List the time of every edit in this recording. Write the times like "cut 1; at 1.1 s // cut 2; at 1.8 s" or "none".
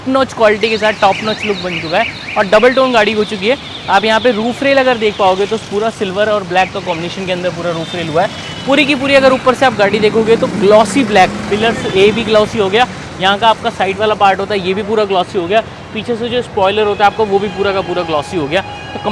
none